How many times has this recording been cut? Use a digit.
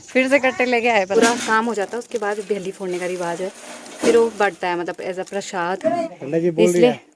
2